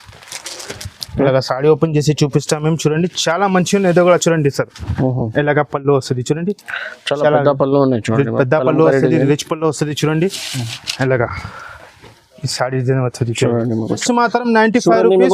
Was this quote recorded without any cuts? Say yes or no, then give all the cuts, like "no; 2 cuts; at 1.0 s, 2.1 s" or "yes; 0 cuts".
no; 1 cut; at 14.0 s